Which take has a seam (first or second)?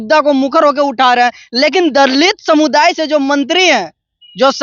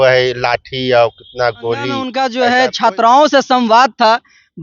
second